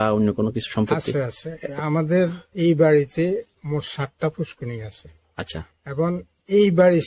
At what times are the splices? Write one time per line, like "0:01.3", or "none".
none